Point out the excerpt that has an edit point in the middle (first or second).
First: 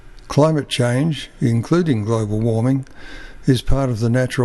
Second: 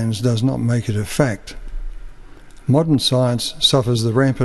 first